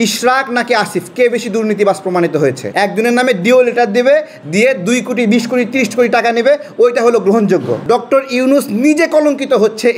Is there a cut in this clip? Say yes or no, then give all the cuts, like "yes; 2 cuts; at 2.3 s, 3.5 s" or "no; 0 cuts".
yes; 2 cuts; at 2.6 s, 7.8 s